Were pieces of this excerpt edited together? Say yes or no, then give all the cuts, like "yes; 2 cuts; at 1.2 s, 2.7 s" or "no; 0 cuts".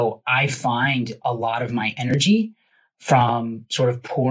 no; 0 cuts